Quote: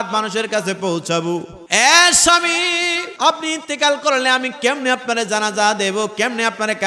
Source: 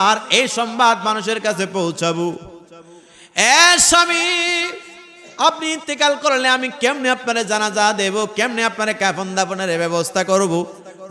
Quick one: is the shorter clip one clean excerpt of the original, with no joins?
no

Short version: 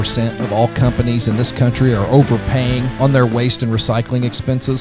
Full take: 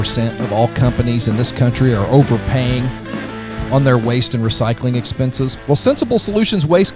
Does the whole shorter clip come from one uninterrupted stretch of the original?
no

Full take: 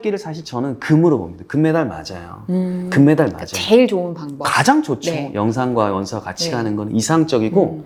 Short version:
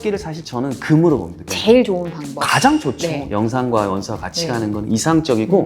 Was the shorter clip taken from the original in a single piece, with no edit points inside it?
no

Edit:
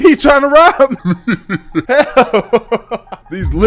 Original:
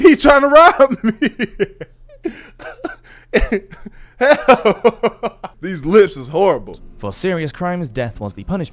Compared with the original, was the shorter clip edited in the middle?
yes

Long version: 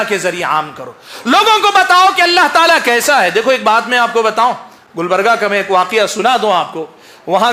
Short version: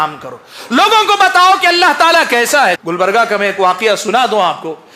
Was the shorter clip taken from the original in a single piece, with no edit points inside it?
no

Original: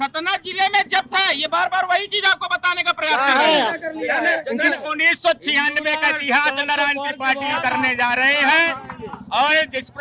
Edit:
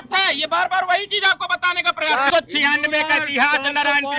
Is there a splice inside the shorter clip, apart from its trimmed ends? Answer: yes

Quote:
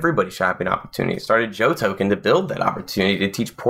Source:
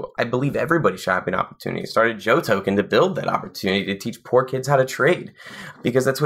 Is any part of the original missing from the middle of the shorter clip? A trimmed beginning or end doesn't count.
no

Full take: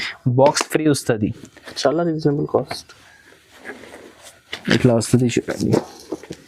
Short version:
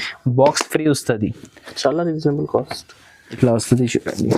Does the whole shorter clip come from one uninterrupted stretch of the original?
no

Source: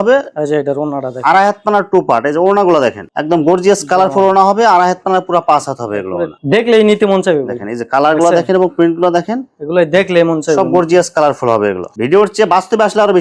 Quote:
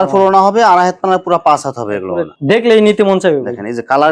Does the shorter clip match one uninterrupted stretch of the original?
yes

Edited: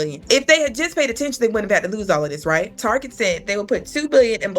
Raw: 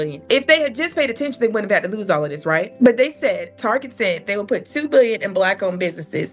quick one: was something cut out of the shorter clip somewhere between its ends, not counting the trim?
yes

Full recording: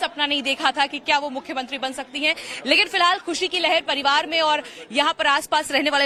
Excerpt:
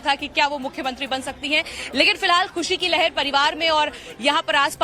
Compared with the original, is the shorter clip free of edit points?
yes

